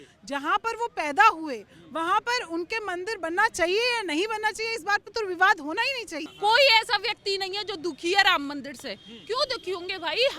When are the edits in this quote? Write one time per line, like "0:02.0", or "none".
0:06.2